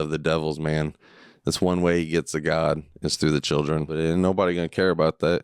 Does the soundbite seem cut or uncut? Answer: cut